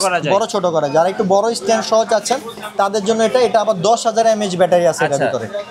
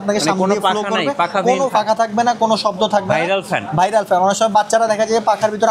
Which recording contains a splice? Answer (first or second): second